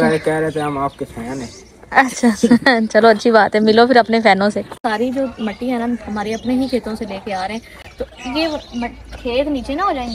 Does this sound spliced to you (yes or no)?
no